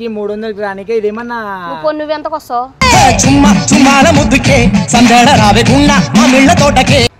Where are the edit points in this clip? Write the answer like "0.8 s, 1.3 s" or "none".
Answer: none